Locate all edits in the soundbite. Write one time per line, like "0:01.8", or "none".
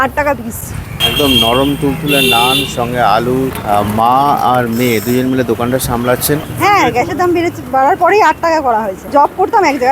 0:01.0
0:03.5
0:06.5
0:09.1